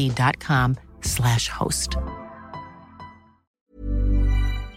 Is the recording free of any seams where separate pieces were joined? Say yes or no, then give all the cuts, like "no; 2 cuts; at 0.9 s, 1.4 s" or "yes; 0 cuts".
no; 1 cut; at 3.5 s